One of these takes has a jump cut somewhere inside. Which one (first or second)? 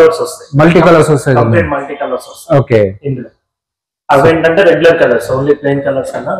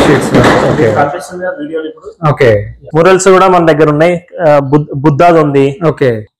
second